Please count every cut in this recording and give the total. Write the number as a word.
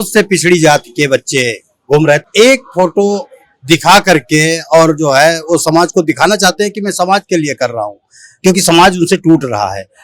one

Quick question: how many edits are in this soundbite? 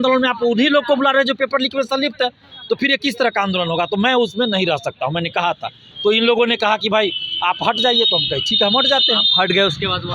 zero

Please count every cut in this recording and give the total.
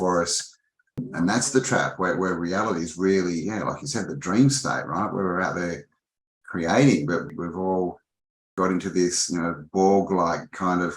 three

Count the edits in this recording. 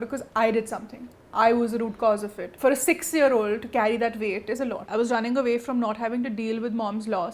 two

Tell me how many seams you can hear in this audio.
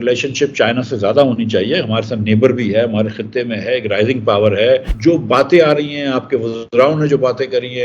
one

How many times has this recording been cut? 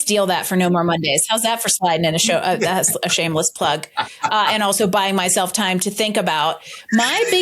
zero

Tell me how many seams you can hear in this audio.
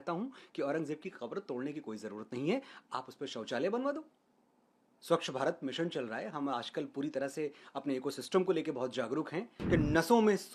one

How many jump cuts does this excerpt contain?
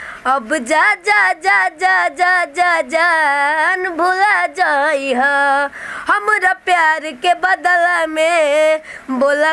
zero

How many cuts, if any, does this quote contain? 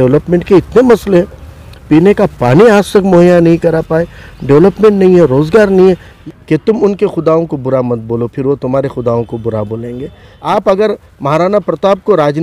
two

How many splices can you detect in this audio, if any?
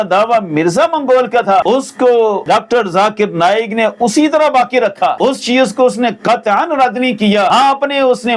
four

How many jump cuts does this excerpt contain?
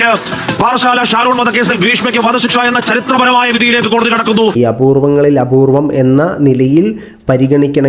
one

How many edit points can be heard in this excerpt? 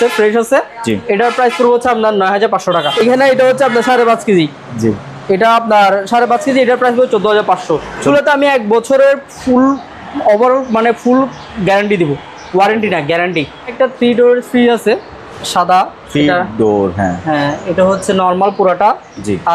three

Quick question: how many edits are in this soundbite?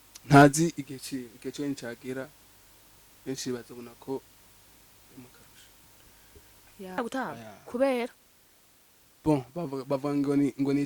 one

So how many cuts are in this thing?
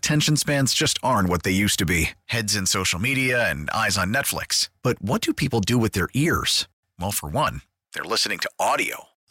zero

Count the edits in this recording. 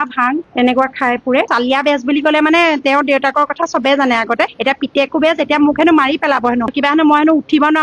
two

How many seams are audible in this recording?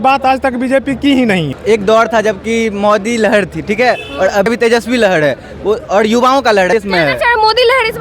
three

